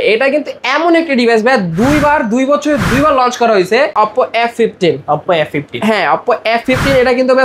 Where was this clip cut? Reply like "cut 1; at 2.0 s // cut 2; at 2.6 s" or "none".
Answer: cut 1; at 3.9 s